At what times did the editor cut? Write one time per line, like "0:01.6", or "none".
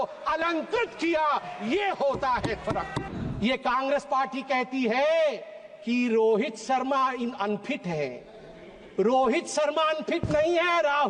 0:03.0